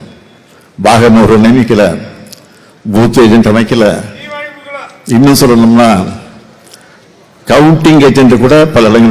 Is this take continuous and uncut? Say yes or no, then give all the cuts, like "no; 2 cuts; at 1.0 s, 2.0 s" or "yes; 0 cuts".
yes; 0 cuts